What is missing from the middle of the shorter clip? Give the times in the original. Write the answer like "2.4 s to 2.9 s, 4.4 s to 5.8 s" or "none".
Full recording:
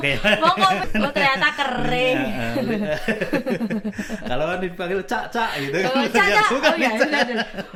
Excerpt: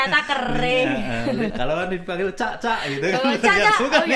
2.8 s to 4.2 s